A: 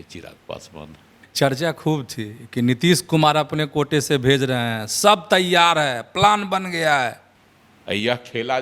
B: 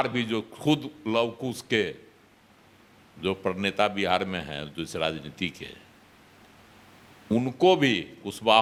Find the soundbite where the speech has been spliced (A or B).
A